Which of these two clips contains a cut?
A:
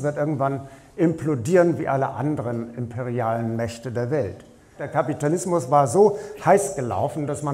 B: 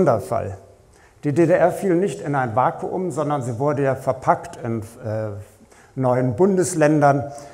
A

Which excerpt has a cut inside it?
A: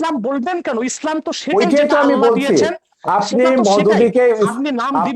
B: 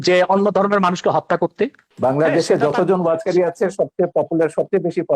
B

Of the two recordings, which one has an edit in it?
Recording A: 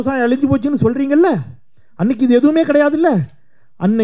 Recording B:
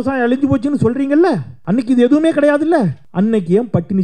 B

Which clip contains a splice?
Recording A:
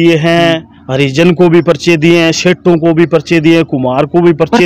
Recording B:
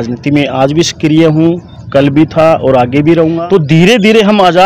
B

